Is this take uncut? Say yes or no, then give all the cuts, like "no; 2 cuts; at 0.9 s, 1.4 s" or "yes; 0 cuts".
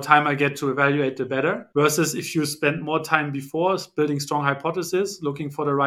yes; 0 cuts